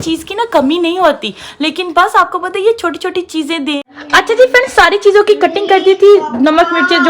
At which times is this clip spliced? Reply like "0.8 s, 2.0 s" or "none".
3.8 s